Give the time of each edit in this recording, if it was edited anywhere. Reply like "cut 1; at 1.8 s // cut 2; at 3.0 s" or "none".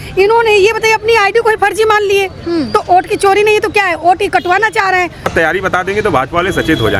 cut 1; at 5.3 s